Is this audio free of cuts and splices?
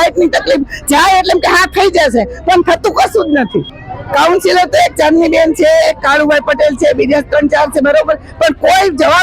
no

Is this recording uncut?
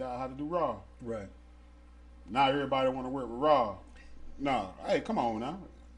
yes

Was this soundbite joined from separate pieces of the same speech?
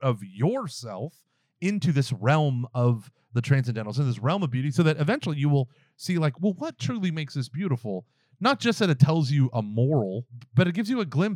yes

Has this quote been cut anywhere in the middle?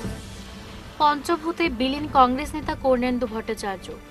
no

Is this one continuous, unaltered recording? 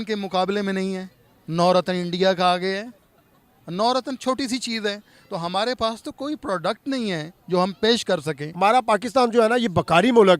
no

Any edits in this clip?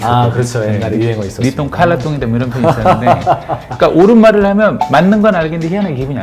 no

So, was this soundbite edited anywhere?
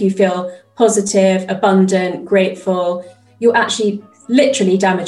yes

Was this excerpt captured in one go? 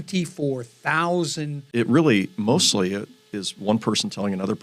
no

